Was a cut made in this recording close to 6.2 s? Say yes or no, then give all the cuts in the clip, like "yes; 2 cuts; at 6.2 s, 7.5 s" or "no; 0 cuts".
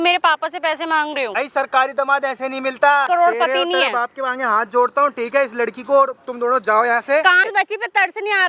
no; 3 cuts; at 1.3 s, 3.1 s, 7.5 s